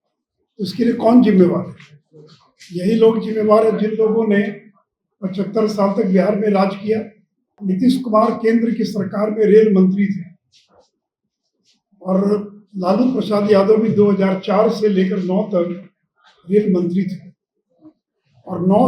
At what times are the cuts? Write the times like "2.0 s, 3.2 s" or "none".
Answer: 7.6 s